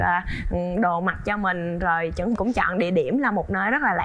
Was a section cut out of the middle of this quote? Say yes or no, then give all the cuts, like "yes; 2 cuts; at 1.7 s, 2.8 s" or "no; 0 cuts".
yes; 1 cut; at 2.4 s